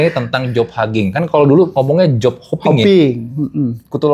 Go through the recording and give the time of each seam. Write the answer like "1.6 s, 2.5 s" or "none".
none